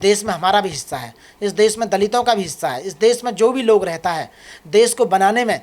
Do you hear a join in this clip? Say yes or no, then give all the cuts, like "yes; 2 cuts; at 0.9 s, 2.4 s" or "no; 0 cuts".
no; 0 cuts